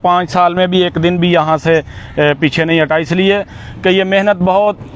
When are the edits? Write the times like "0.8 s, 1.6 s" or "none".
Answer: none